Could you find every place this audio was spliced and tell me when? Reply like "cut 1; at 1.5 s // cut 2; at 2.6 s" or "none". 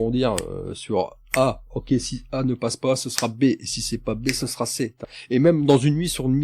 cut 1; at 5.1 s

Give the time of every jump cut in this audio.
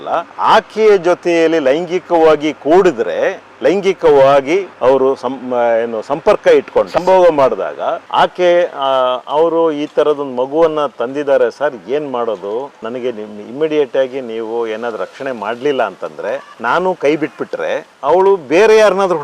cut 1; at 8.0 s // cut 2; at 16.5 s

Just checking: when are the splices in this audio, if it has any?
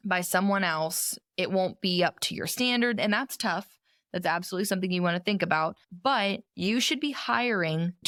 none

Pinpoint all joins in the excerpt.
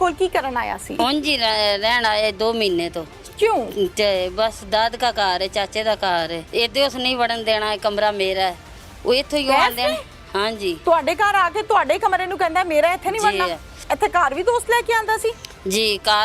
cut 1; at 1.0 s // cut 2; at 6.4 s // cut 3; at 13.9 s

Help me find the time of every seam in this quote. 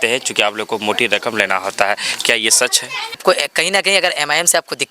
cut 1; at 3.1 s

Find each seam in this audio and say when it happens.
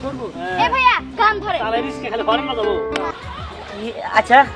cut 1; at 3.1 s

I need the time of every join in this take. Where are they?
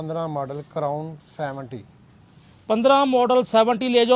none

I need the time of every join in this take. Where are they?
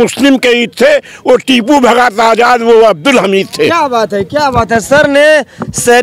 none

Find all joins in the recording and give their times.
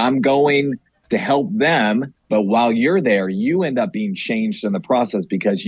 cut 1; at 2.2 s

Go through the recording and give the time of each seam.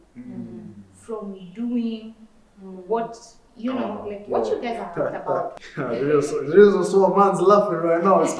cut 1; at 5.5 s

